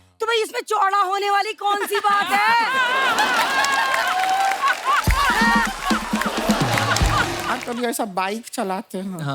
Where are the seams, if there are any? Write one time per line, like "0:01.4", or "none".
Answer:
0:07.4